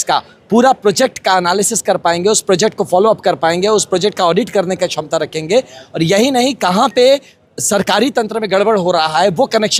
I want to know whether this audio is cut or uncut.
uncut